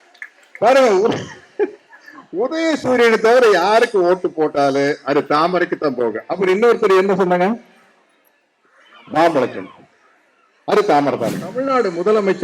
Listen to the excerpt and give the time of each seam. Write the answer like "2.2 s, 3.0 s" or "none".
11.5 s